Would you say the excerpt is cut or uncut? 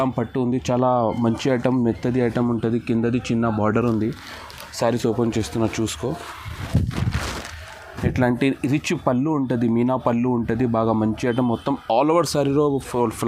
uncut